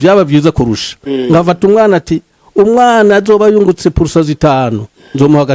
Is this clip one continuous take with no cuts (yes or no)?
yes